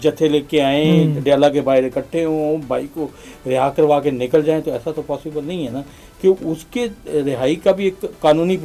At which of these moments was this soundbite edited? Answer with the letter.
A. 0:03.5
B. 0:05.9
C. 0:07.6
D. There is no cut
D